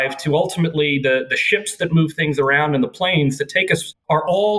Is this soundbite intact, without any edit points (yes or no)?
yes